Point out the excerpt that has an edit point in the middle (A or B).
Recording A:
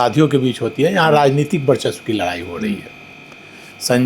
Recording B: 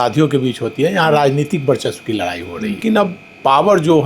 B